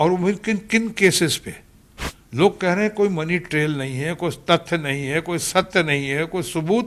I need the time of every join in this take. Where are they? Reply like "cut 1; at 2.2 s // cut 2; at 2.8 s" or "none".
none